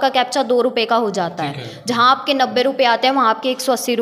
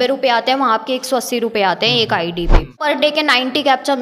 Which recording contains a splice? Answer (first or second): second